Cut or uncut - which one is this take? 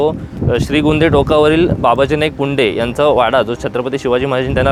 uncut